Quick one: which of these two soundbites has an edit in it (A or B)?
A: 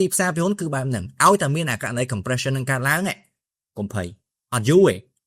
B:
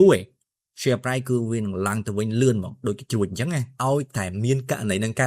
B